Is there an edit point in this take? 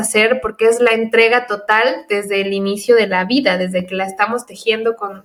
no; 0 cuts

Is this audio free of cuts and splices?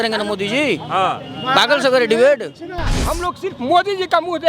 no; 1 cut; at 3.0 s

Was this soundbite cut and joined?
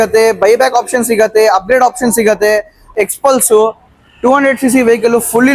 yes; 1 cut; at 2.9 s

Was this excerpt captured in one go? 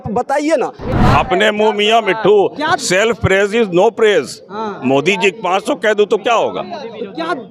no; 1 cut; at 1.0 s

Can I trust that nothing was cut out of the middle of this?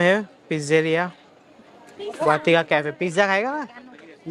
yes; 0 cuts

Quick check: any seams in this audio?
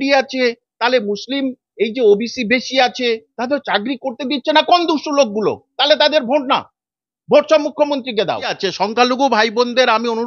yes; 1 cut; at 8.5 s

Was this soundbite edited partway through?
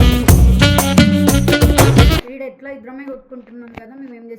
yes; 1 cut; at 2.2 s

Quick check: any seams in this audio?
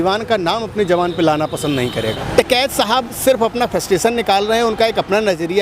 yes; 1 cut; at 2.2 s

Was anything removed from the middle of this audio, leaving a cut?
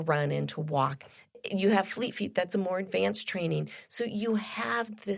no; 0 cuts

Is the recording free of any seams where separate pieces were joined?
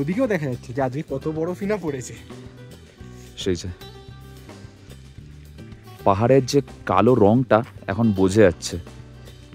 yes; 0 cuts

